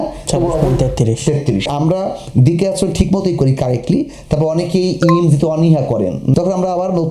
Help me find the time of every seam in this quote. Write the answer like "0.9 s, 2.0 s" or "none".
1.7 s, 6.3 s